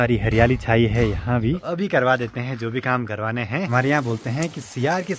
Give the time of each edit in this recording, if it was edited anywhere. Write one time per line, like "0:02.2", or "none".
0:01.6
0:03.7

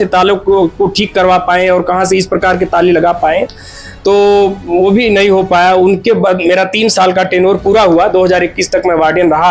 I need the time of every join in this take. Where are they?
none

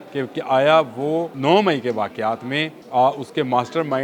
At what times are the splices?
0:01.3
0:02.7

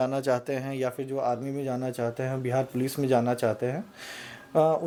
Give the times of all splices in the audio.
none

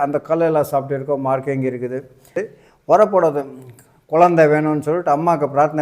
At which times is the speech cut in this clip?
0:02.3

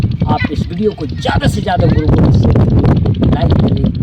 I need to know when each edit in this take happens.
none

